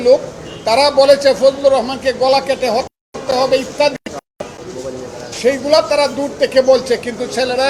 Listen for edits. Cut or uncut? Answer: uncut